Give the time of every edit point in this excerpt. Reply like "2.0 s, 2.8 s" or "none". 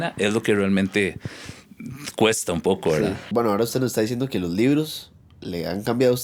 none